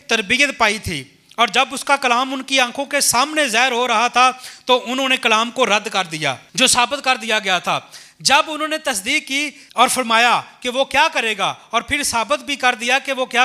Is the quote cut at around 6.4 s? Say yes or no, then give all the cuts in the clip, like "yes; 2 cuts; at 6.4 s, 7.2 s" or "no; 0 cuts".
yes; 2 cuts; at 6.4 s, 9.6 s